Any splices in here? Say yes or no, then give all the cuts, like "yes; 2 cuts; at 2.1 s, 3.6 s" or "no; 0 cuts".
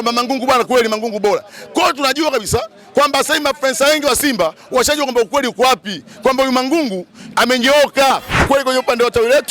yes; 1 cut; at 8.3 s